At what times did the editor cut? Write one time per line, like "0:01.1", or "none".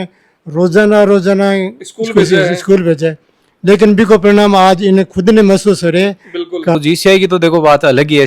0:06.8